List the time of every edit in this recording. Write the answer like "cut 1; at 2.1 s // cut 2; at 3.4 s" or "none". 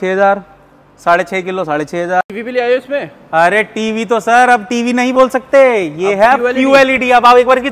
cut 1; at 2.3 s